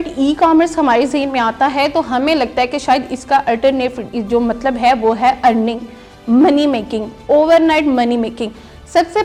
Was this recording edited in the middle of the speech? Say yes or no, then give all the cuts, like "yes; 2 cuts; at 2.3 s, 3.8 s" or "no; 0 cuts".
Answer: no; 0 cuts